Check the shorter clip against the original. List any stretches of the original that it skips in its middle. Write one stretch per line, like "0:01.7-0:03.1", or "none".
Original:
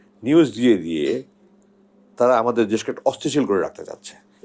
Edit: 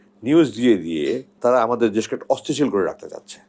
0:01.3-0:02.0